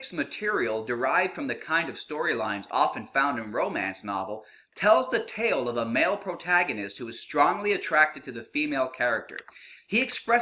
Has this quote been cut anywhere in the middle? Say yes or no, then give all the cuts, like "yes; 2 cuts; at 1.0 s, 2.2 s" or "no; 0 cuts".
no; 0 cuts